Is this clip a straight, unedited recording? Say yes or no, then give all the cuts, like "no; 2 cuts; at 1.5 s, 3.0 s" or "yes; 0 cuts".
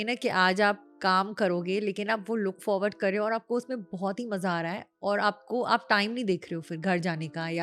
yes; 0 cuts